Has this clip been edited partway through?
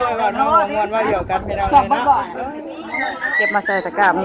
yes; 1 cut; at 2.9 s

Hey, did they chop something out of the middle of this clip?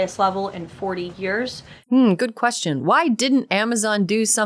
yes; 1 cut; at 1.7 s

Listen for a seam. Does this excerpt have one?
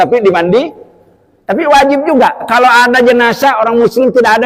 no; 0 cuts

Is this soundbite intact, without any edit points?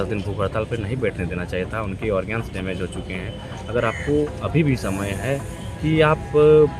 yes; 0 cuts

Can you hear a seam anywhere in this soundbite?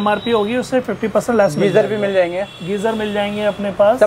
no; 0 cuts

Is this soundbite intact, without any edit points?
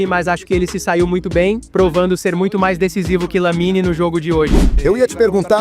no; 2 cuts; at 1.7 s, 4.7 s

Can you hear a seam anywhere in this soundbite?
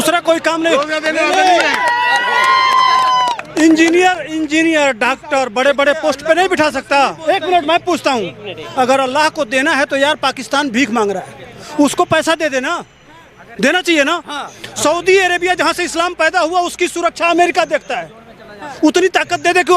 no; 0 cuts

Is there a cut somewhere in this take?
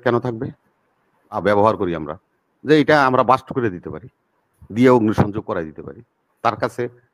yes; 1 cut; at 1.4 s

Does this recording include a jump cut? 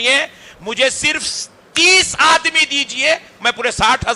no; 0 cuts

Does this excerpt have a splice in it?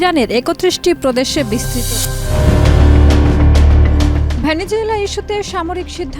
yes; 1 cut; at 1.7 s

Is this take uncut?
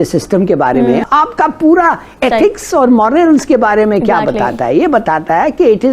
no; 1 cut; at 1.0 s

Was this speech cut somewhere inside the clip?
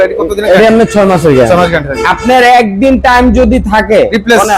no; 0 cuts

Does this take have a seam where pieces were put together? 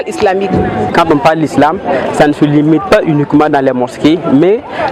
yes; 1 cut; at 0.9 s

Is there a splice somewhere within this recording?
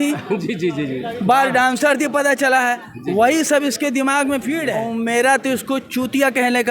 yes; 1 cut; at 4.8 s

